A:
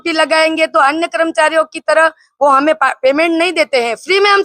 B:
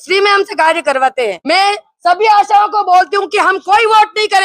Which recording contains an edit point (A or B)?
B